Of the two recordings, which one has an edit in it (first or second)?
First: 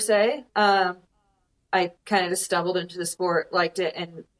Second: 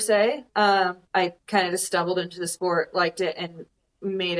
second